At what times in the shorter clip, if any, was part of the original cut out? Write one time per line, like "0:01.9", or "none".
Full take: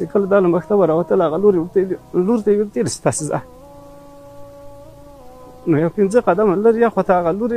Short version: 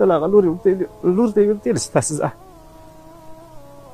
none